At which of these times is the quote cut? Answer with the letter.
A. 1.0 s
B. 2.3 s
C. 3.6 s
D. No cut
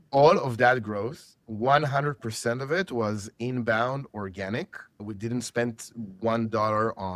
D